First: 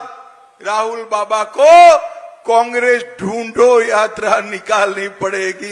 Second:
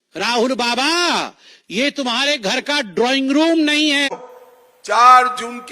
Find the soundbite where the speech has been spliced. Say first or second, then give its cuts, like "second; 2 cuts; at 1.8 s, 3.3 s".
second; 1 cut; at 4.2 s